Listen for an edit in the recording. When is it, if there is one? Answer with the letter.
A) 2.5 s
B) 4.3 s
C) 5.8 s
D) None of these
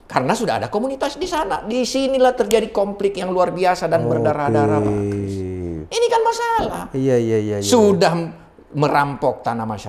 C